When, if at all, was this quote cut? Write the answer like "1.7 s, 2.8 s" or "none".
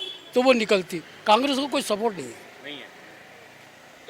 none